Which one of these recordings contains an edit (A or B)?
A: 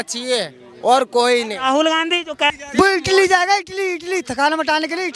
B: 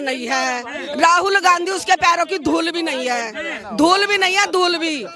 A